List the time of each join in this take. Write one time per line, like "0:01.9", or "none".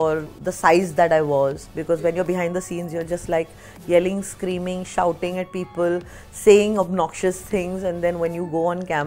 0:01.7